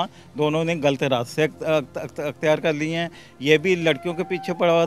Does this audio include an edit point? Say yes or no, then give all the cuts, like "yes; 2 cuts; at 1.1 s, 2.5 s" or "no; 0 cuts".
no; 0 cuts